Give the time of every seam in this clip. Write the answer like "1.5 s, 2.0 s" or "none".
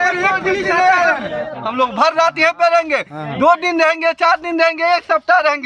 1.6 s